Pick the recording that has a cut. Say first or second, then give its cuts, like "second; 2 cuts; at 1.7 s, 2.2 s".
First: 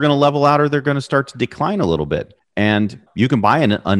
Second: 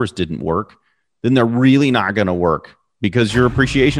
first; 1 cut; at 2.4 s